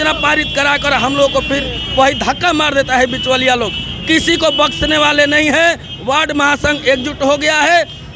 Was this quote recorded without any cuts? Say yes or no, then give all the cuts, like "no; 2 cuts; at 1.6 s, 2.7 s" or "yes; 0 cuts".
yes; 0 cuts